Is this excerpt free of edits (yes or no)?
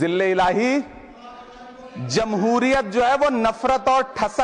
yes